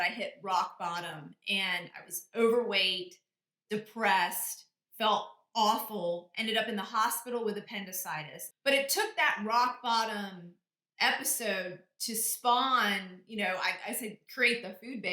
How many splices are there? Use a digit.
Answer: 1